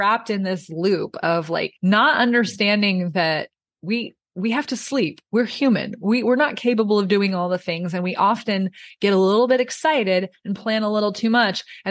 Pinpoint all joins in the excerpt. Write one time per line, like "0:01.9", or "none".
0:01.7